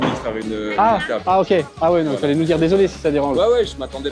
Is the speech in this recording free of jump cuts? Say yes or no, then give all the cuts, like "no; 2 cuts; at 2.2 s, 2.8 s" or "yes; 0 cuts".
yes; 0 cuts